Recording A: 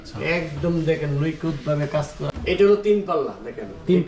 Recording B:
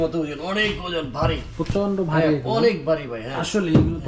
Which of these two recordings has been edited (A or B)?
A